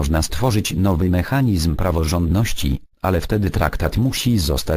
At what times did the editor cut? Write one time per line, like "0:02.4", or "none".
none